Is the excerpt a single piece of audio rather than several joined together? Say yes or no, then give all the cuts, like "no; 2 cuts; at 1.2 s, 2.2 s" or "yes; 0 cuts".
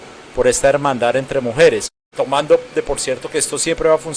no; 1 cut; at 2.0 s